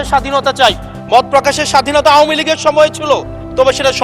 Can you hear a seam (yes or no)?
yes